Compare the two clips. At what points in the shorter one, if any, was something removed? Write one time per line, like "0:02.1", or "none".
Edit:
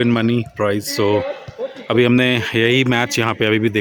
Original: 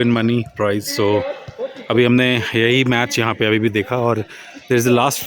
none

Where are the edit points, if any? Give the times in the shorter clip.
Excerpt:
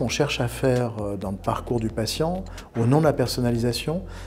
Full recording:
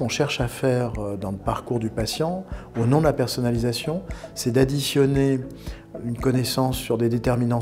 none

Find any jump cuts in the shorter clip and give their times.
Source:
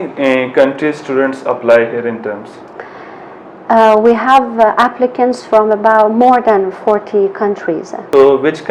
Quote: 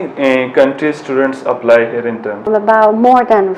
0:02.5

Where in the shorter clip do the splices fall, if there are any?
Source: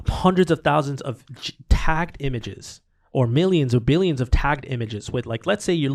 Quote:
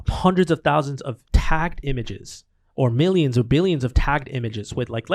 0:01.2

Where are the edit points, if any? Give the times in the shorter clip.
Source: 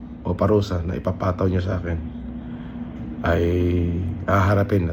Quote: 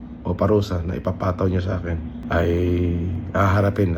0:02.2

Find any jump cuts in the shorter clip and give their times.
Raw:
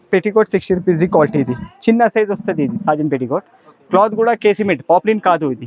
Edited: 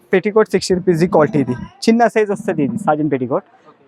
none

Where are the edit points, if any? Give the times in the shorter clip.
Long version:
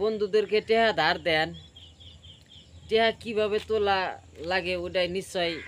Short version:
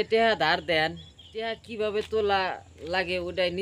0:01.7

